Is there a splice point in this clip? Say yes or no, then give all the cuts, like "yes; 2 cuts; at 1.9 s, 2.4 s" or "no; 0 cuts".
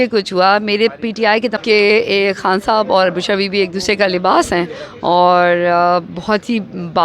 yes; 1 cut; at 1.6 s